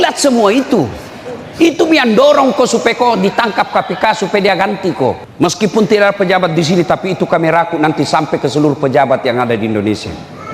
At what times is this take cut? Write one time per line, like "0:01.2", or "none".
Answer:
0:05.3